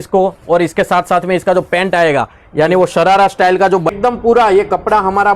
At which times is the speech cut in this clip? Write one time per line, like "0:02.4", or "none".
0:03.9

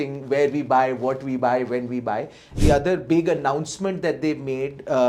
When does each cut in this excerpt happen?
0:02.5

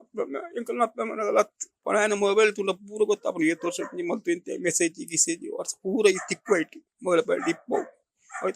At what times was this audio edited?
0:01.8

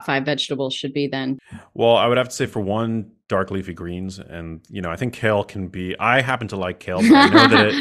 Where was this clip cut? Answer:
0:01.4

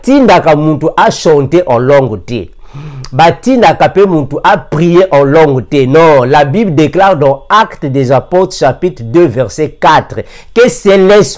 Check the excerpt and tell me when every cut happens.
none

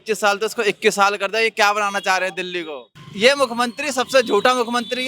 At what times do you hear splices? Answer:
0:03.0

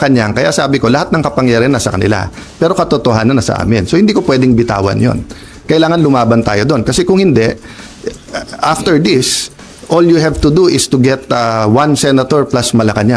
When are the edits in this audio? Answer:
none

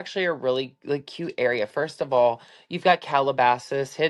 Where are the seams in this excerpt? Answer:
none

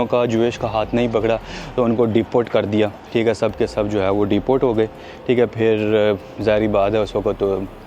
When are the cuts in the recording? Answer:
none

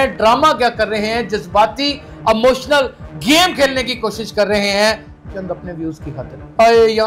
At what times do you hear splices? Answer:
none

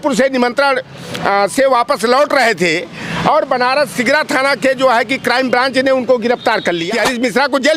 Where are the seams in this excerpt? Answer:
0:06.8

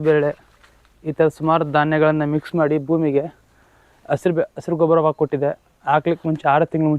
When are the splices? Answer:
none

